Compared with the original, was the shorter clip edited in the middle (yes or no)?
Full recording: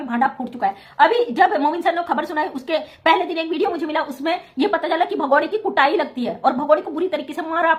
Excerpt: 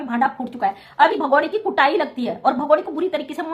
yes